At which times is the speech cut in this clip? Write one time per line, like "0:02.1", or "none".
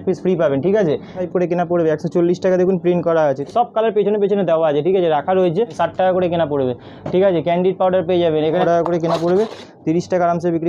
0:01.2
0:03.4
0:05.7
0:08.6